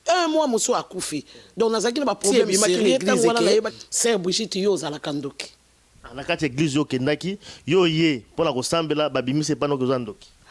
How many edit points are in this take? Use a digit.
1